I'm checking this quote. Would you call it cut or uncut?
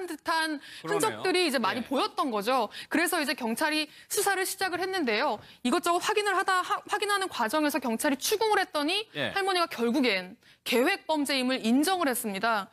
cut